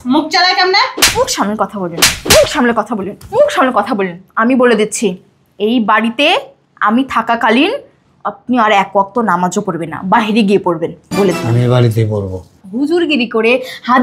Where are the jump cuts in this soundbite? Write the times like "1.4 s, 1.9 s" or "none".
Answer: 12.6 s

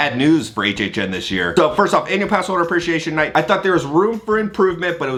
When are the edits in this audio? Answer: none

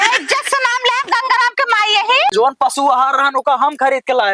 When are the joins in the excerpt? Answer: 2.3 s

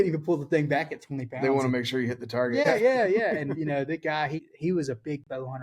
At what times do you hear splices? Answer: 2.6 s, 4.5 s

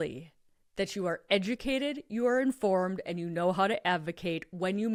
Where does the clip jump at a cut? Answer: none

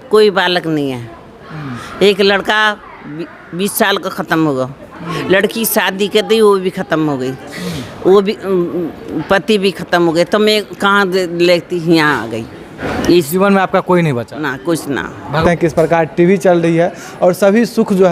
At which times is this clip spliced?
12.8 s, 15.4 s

